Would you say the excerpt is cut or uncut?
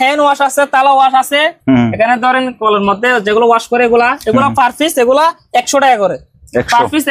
uncut